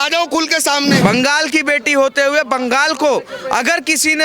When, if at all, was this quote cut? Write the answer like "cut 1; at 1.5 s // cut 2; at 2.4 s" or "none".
cut 1; at 1.0 s